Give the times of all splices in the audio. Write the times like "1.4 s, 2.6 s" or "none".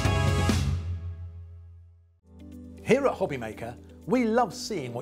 2.2 s